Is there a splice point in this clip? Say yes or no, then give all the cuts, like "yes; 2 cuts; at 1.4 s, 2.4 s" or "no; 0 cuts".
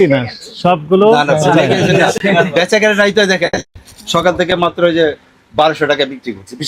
no; 0 cuts